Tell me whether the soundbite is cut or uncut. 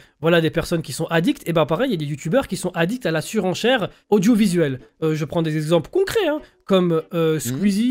cut